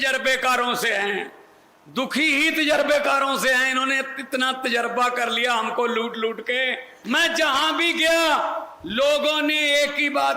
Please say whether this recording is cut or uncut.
cut